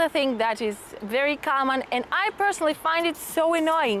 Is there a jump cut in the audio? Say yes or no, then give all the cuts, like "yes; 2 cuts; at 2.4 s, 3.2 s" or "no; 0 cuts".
no; 0 cuts